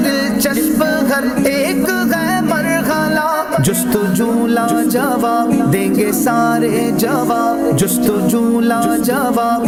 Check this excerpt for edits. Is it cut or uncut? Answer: uncut